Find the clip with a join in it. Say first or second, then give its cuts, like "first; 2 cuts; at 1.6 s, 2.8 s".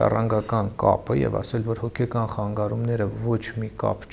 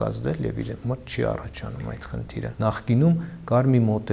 second; 1 cut; at 2.5 s